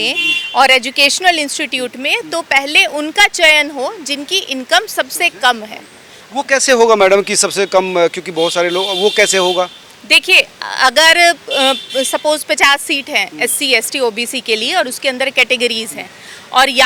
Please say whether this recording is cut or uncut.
uncut